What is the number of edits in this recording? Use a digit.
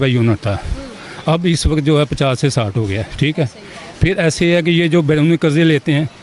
0